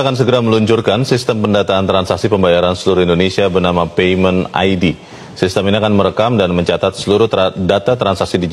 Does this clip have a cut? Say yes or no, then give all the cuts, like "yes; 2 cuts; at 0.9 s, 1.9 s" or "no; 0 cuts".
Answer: no; 0 cuts